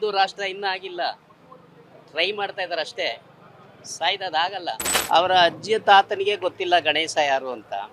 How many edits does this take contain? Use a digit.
1